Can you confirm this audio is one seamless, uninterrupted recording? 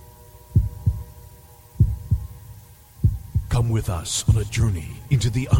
yes; 0 cuts

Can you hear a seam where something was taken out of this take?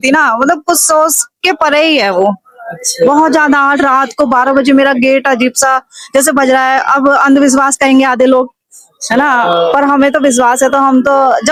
no; 0 cuts

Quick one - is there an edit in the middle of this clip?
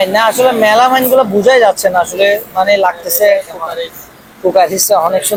no; 0 cuts

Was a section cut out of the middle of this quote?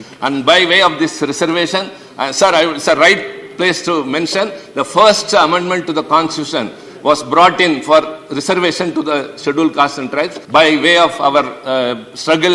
yes; 1 cut; at 10.4 s

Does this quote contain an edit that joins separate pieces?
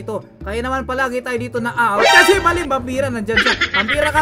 no; 0 cuts

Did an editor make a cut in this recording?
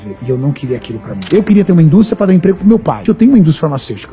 yes; 2 cuts; at 1.2 s, 3.0 s

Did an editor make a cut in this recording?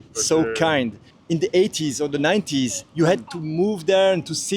yes; 1 cut; at 1.1 s

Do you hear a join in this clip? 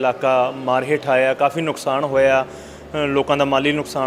no; 0 cuts

